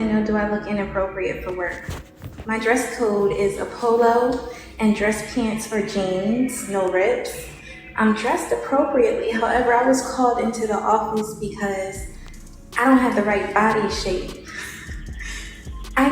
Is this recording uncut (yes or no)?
no